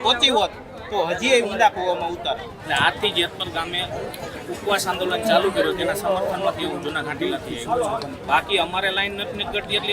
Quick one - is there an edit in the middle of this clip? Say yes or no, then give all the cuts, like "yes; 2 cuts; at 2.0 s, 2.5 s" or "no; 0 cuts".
yes; 2 cuts; at 2.5 s, 8.2 s